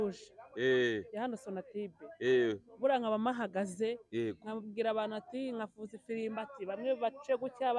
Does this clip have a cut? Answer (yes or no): no